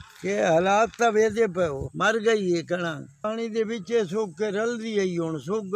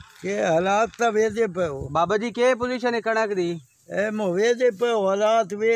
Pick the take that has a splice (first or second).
first